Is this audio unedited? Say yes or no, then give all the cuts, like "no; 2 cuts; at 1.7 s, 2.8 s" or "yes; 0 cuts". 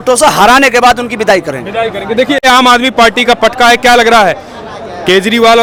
yes; 0 cuts